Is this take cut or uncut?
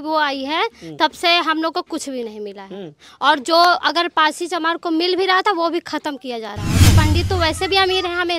cut